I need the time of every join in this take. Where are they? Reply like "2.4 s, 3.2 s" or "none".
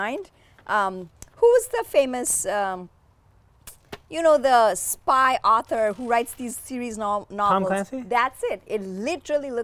none